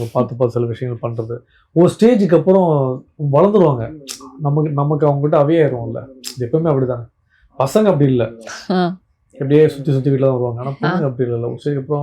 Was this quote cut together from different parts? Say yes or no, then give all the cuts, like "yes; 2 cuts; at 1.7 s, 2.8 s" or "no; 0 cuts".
no; 0 cuts